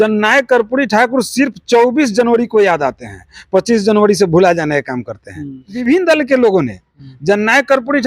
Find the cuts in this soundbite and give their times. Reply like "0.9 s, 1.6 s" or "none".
5.8 s